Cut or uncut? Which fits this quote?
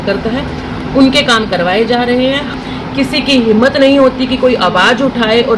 cut